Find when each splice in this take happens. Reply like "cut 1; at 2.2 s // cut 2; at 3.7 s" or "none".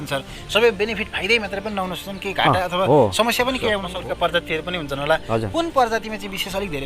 cut 1; at 3.9 s